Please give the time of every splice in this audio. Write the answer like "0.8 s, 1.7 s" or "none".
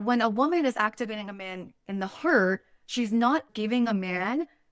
3.5 s